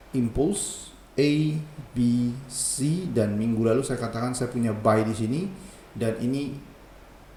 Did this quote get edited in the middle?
no; 0 cuts

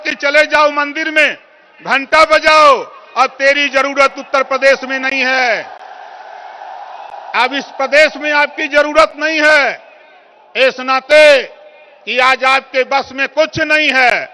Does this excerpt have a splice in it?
no; 0 cuts

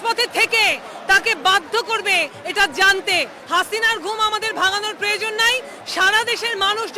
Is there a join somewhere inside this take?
yes; 1 cut; at 3.4 s

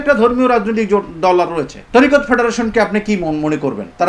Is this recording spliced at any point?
yes; 1 cut; at 1.8 s

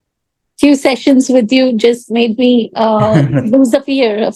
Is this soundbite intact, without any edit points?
yes; 0 cuts

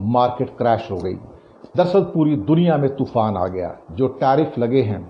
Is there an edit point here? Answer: no; 0 cuts

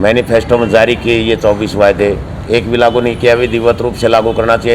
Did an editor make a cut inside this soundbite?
no; 0 cuts

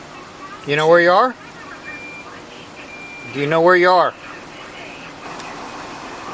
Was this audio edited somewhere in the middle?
yes; 2 cuts; at 2.8 s, 5.3 s

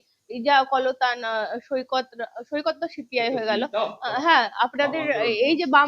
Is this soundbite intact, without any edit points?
yes; 0 cuts

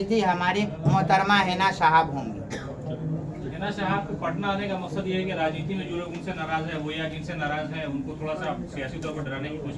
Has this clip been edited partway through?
no; 0 cuts

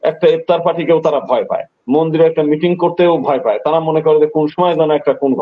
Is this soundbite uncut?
yes; 0 cuts

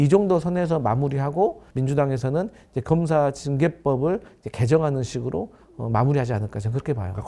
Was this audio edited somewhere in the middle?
no; 0 cuts

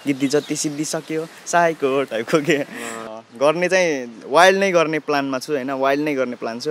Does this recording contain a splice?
yes; 1 cut; at 3.0 s

